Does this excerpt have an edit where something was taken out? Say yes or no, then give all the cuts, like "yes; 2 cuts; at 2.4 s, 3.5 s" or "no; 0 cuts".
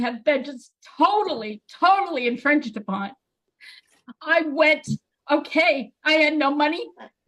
no; 0 cuts